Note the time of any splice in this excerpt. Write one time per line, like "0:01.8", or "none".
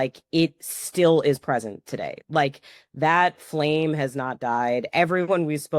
none

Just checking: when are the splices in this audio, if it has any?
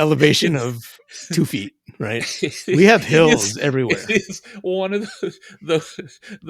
none

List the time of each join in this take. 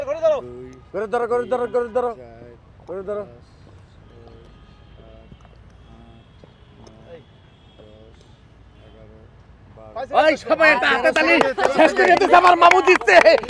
none

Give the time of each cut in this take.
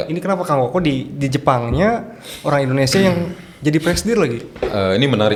none

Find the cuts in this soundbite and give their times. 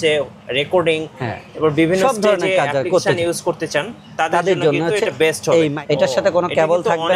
0:05.8

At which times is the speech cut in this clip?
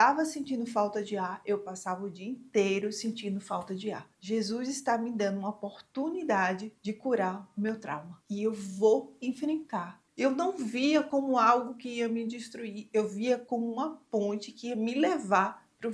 0:04.1
0:10.0

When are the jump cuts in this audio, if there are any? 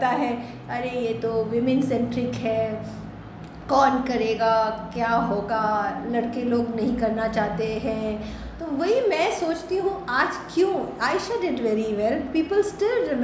0:08.5

